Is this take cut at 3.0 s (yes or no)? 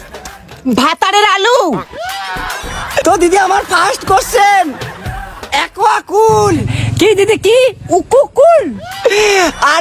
yes